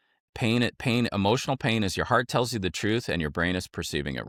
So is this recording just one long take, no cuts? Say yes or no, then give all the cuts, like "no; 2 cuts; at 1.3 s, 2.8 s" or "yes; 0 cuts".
yes; 0 cuts